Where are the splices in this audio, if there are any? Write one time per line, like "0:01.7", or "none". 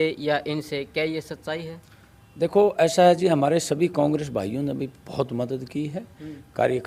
none